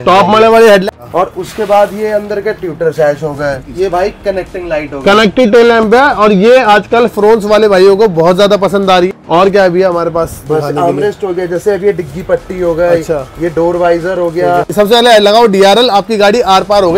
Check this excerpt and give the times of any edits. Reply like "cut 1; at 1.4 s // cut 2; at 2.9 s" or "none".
cut 1; at 0.8 s // cut 2; at 3.6 s // cut 3; at 9.1 s // cut 4; at 14.7 s